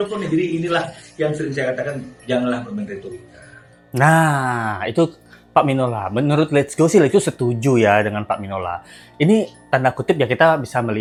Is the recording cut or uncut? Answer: uncut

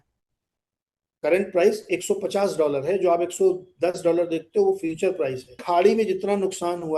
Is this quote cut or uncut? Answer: cut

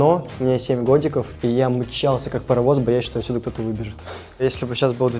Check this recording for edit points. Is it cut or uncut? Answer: cut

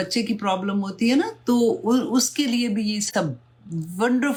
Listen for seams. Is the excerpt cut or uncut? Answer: uncut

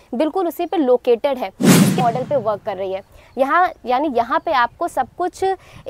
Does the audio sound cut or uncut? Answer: cut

